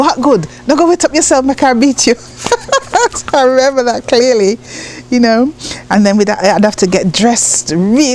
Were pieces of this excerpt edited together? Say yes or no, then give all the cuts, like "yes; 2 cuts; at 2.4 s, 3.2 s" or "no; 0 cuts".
no; 0 cuts